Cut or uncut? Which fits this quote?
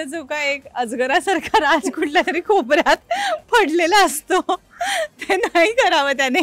uncut